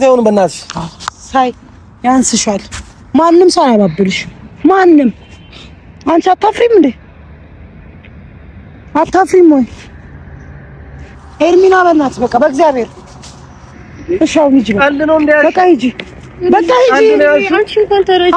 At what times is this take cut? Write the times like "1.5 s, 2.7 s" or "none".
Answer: none